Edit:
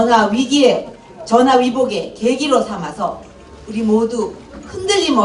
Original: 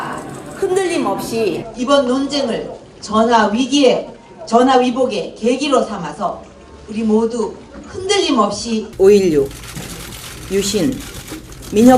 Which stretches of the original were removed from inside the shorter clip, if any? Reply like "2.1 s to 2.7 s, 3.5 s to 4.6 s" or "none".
none